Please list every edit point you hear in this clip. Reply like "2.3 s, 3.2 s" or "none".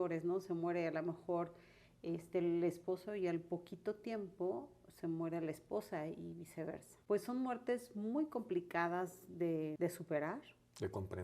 6.9 s, 9.7 s